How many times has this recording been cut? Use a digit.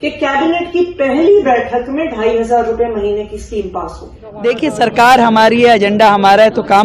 1